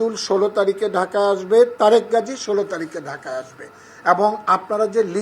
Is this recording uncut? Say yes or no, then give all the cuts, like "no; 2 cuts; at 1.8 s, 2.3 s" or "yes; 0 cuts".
yes; 0 cuts